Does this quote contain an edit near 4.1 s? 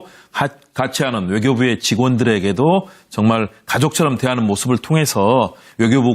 yes; 1 cut; at 4.1 s

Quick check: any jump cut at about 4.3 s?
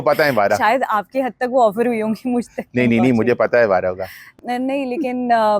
yes; 1 cut; at 4.3 s

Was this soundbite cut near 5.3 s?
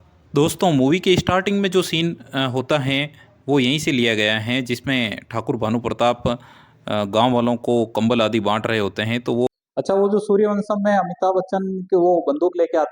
no; 1 cut; at 9.5 s

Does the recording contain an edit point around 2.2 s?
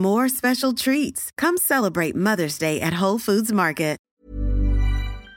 no; 1 cut; at 4.1 s

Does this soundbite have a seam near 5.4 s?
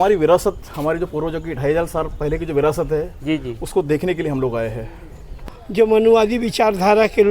yes; 1 cut; at 5.4 s

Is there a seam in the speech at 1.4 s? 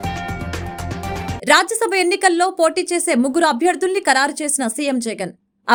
no; 0 cuts

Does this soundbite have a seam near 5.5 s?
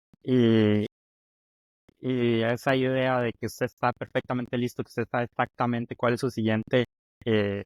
no; 0 cuts

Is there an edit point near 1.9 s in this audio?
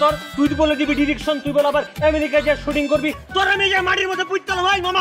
no; 1 cut; at 3.2 s

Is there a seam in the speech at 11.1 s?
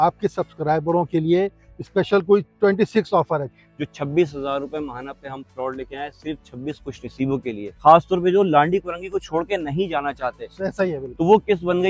yes; 3 cuts; at 3.5 s, 7.8 s, 11.1 s

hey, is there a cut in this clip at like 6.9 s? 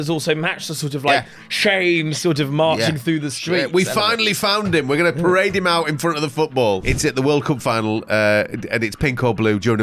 yes; 1 cut; at 6.9 s

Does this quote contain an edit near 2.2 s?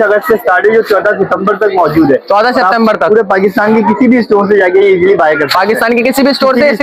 no; 0 cuts

